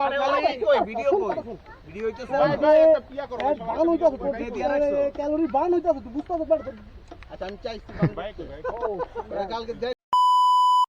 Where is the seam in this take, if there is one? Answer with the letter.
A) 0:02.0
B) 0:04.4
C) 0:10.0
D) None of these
C